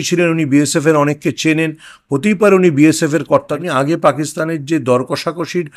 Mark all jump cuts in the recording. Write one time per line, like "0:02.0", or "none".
0:03.5